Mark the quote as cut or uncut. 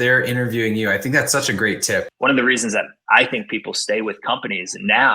cut